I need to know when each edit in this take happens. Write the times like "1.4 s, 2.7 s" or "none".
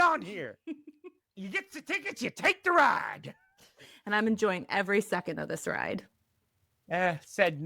1.4 s